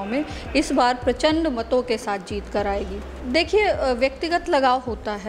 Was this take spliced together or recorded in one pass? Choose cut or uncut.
cut